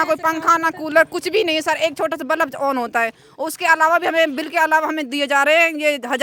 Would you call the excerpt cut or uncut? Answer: uncut